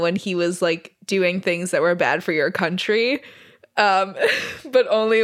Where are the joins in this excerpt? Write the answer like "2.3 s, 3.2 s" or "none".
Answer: 0.9 s